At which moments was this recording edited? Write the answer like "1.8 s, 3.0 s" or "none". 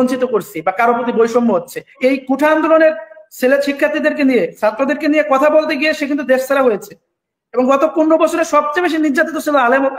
1.9 s